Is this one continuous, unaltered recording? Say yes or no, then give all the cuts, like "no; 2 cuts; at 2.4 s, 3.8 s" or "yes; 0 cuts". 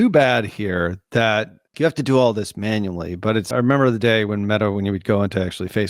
no; 2 cuts; at 1.6 s, 3.5 s